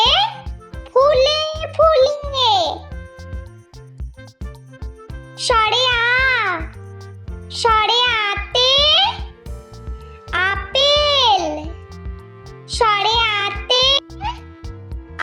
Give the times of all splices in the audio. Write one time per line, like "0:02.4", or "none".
0:02.8
0:04.9